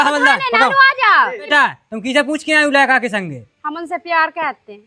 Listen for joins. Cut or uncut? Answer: cut